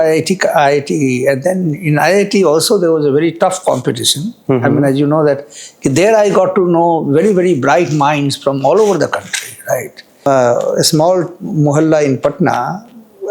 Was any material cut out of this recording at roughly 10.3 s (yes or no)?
yes